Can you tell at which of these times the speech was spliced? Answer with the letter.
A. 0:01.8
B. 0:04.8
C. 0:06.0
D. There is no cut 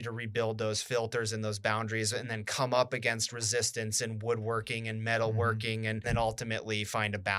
C